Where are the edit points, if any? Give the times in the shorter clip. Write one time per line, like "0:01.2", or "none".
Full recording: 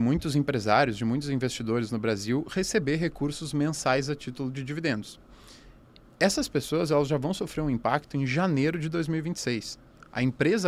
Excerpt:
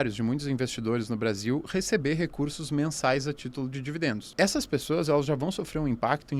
0:04.2